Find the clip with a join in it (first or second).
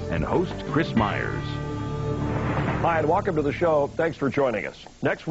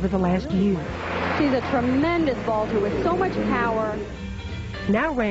second